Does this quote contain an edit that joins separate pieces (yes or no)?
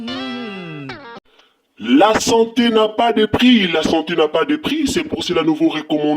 yes